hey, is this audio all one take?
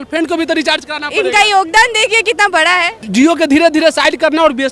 no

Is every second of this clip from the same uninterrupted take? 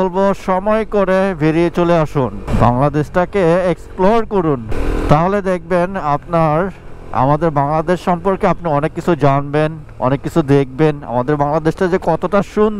no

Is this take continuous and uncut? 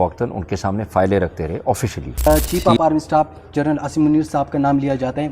no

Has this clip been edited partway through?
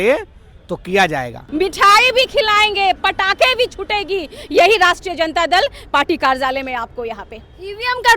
yes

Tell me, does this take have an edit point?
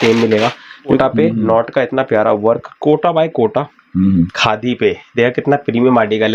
yes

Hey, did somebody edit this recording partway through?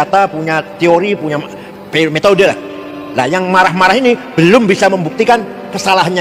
no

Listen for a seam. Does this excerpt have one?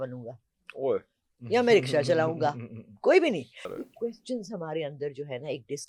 yes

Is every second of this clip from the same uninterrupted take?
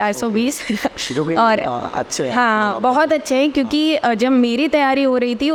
yes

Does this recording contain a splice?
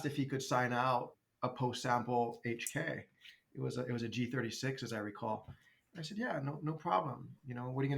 yes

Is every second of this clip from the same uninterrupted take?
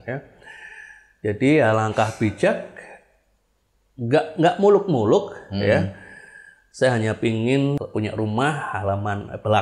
no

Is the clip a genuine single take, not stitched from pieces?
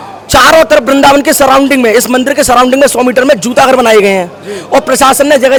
yes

